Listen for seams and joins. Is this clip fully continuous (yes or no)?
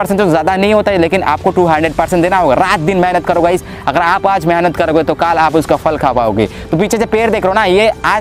yes